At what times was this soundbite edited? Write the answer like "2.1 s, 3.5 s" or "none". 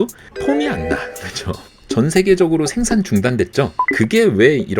1.8 s